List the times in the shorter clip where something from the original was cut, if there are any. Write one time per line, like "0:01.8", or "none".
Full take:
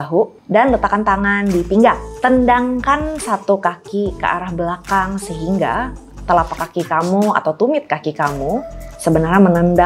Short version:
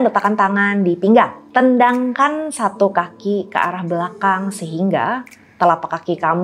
none